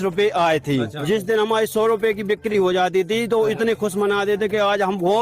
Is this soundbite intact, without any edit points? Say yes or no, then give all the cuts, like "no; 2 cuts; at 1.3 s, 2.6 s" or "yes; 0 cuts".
no; 1 cut; at 0.9 s